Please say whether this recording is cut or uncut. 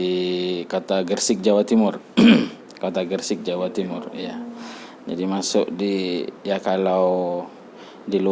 uncut